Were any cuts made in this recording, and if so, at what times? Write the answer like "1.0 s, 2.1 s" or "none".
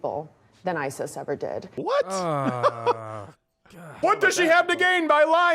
1.7 s, 4.0 s